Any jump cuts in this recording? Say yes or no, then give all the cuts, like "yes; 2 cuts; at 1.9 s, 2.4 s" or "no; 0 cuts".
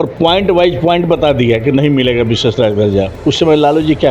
yes; 1 cut; at 3.1 s